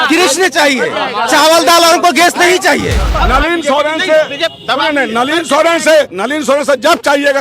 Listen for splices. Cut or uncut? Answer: cut